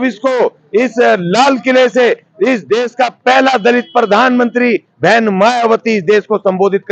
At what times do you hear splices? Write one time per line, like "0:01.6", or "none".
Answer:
none